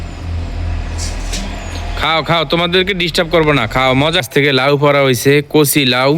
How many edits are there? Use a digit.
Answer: 1